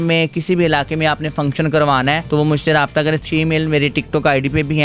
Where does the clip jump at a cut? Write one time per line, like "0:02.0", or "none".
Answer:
0:02.2
0:03.2